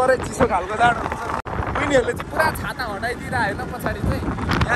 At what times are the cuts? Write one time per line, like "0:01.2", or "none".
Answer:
0:01.5